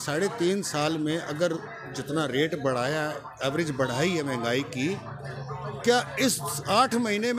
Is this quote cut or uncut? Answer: uncut